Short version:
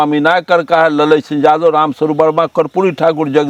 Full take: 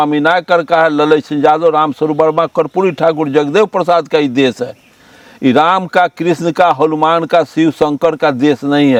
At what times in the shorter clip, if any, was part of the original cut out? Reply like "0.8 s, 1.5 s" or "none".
none